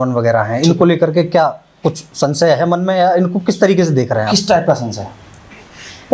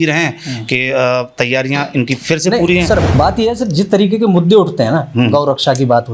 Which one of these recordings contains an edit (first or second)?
second